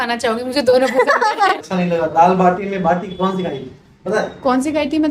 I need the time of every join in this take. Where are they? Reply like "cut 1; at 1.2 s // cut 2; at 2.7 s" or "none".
cut 1; at 1.6 s